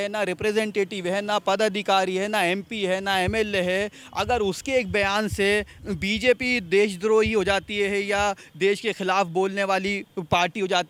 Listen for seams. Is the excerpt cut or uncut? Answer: uncut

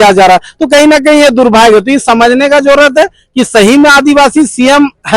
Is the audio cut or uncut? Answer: uncut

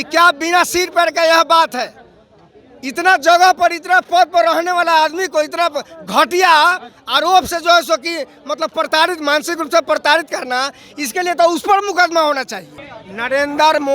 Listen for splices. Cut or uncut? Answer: cut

